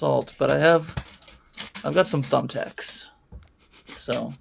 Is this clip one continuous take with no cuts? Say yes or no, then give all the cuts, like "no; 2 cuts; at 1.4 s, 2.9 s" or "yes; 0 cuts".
yes; 0 cuts